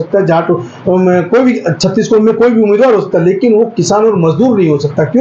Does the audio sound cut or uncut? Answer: uncut